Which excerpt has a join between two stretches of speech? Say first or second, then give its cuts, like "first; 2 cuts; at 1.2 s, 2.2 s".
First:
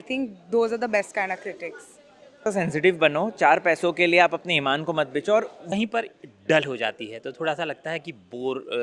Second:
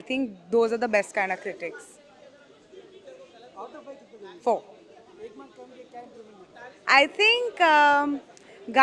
first; 2 cuts; at 2.5 s, 5.7 s